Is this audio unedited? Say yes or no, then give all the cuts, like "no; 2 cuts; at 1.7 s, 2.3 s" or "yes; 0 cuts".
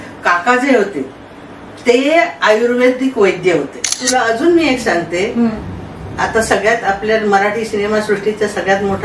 no; 1 cut; at 4.0 s